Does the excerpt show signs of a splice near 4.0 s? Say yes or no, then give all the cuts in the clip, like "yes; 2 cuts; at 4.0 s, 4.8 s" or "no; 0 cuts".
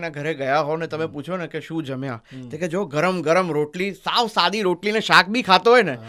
no; 0 cuts